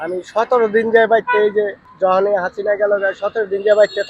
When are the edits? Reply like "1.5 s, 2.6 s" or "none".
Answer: none